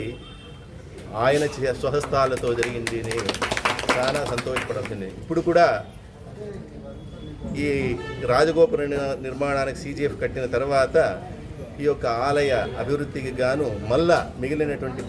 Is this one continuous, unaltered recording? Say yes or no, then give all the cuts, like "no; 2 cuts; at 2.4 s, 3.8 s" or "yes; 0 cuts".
yes; 0 cuts